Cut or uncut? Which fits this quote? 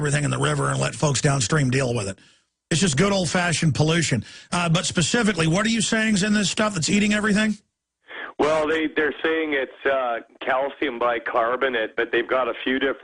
cut